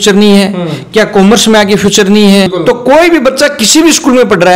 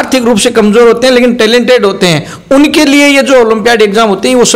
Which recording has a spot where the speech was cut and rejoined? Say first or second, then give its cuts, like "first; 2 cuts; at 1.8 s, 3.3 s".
first; 1 cut; at 2.5 s